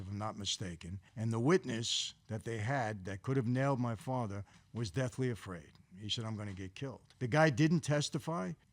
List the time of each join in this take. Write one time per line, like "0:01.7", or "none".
0:01.0
0:07.0